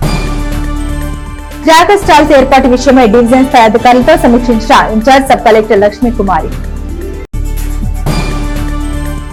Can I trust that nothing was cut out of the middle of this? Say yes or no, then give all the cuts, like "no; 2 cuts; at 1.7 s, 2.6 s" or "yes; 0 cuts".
yes; 0 cuts